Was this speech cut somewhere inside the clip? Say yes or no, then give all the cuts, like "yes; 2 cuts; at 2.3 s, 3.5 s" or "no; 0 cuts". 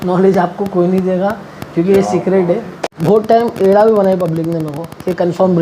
yes; 1 cut; at 2.9 s